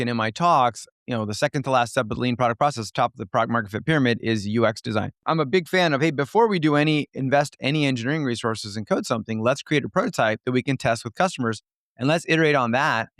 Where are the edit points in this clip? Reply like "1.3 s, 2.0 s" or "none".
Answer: 0.9 s, 5.2 s